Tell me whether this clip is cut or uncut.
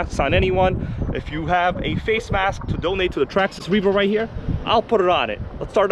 uncut